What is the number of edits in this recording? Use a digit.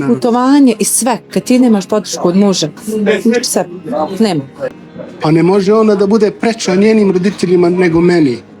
1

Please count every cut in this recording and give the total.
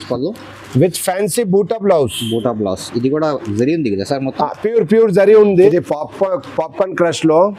1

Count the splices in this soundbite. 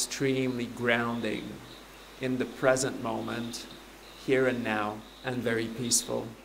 1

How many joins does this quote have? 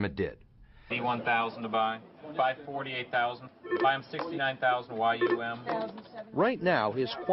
0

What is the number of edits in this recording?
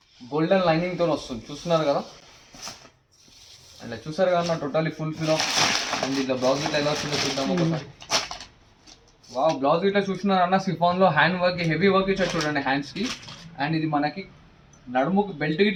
0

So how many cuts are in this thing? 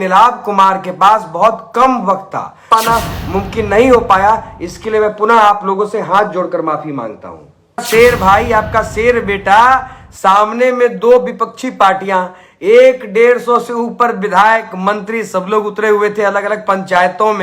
2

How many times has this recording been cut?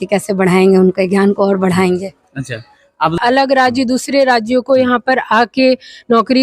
1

